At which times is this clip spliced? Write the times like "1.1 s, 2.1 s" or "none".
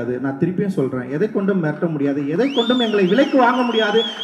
none

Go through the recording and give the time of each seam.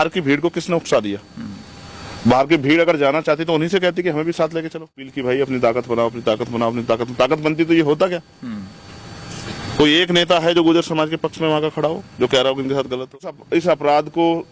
5.1 s, 13.3 s

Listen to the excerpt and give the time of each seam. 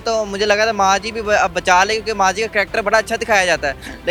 none

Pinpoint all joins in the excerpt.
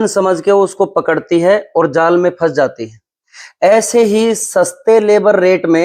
none

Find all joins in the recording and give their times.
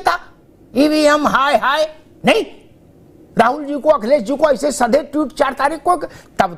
none

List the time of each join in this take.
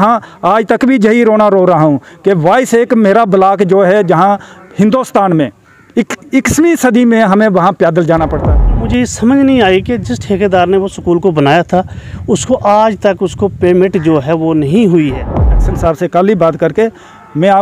8.9 s, 15.5 s

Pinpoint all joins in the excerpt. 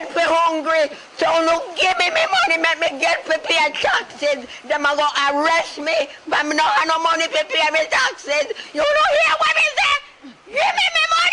10.3 s

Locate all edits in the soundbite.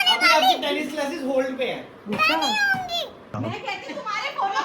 3.2 s

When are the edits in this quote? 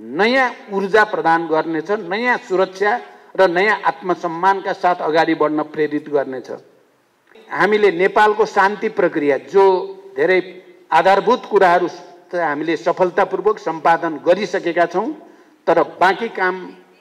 7.4 s

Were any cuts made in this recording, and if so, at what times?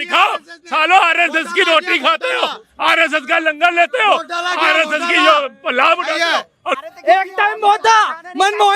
6.7 s

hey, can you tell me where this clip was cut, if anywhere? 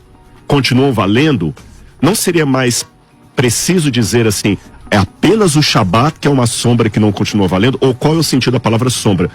none

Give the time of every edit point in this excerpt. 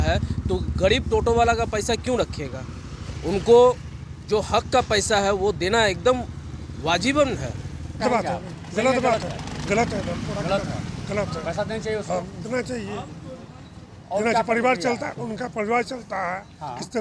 none

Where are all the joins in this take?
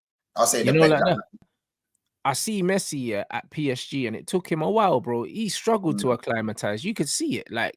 1.5 s

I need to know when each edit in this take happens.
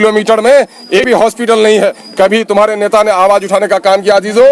1.0 s

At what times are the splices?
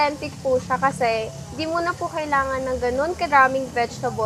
none

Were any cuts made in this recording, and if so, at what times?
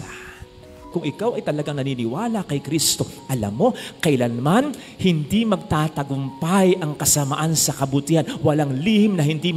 0.9 s

